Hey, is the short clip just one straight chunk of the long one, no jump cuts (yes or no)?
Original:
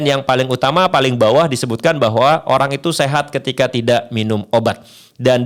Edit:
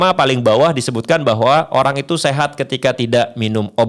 yes